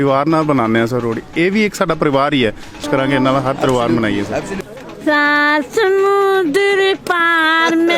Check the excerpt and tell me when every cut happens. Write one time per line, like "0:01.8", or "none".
0:02.8
0:04.7